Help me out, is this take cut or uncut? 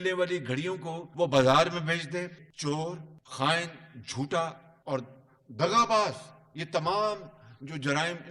cut